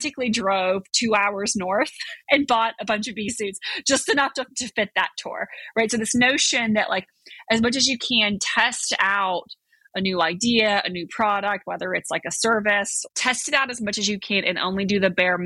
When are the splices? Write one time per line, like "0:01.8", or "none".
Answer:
0:13.0